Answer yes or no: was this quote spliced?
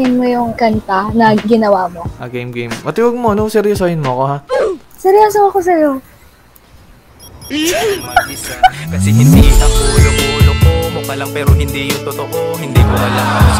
yes